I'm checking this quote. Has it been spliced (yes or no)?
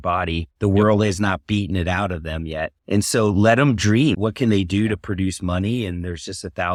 no